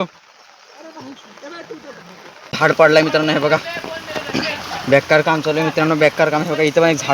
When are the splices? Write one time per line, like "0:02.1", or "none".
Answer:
0:02.5